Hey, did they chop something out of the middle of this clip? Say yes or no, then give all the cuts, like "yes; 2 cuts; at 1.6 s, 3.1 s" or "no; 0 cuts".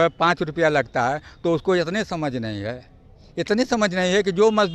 no; 0 cuts